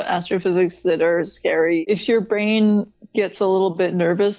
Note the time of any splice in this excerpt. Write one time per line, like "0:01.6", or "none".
0:01.8
0:03.0